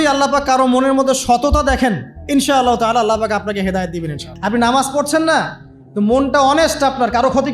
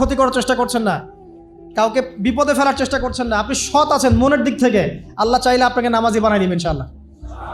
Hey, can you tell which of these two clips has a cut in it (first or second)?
first